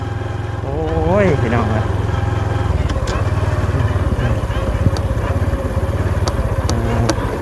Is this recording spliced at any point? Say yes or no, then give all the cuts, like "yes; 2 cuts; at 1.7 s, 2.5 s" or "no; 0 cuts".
no; 0 cuts